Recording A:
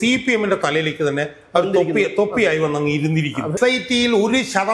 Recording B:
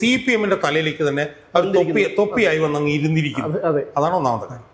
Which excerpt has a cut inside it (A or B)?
A